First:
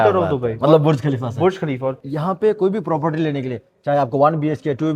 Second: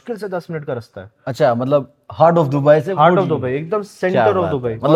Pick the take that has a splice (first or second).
first